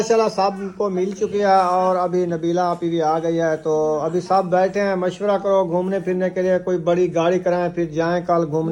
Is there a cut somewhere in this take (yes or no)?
no